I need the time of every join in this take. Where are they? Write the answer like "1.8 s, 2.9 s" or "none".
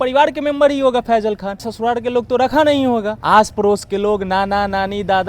1.7 s, 3.1 s